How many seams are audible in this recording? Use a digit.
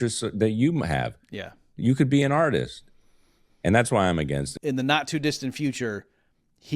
1